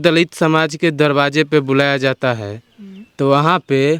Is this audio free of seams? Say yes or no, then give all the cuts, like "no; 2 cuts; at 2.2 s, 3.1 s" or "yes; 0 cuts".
yes; 0 cuts